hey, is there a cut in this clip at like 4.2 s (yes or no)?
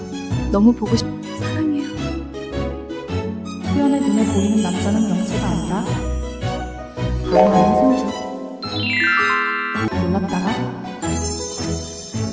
no